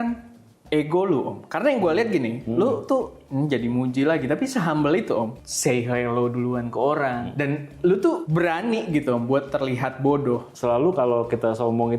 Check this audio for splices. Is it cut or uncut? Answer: cut